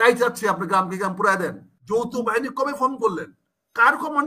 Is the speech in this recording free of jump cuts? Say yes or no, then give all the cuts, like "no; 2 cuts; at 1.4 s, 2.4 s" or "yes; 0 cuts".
no; 1 cut; at 1.7 s